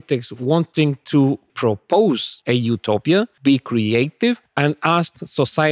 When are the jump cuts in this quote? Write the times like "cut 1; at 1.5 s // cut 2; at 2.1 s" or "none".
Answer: cut 1; at 1.5 s // cut 2; at 2.3 s // cut 3; at 3.3 s // cut 4; at 4.5 s